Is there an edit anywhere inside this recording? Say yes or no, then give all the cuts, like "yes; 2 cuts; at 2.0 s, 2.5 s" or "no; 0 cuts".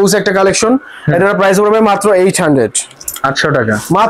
no; 0 cuts